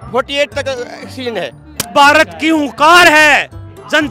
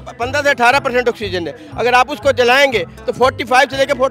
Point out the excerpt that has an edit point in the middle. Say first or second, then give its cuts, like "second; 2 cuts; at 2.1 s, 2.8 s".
first; 1 cut; at 1.8 s